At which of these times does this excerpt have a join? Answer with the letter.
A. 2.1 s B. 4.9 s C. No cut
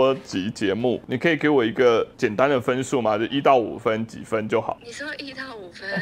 B